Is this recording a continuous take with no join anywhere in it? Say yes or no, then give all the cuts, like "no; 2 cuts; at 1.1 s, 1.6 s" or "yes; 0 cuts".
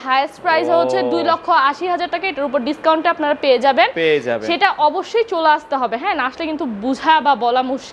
yes; 0 cuts